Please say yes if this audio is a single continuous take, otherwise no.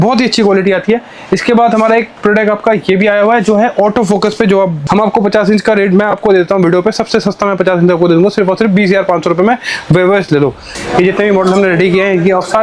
no